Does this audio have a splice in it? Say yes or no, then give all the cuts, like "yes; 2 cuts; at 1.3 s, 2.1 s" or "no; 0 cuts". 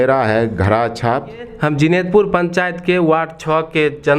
yes; 1 cut; at 1.5 s